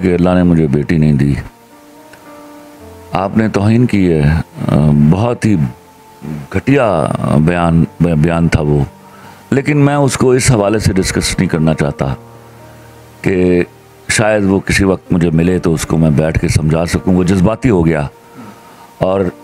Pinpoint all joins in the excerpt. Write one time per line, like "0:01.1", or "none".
none